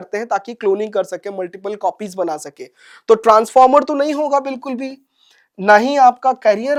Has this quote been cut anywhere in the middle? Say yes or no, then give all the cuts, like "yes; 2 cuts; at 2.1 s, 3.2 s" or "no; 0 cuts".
no; 0 cuts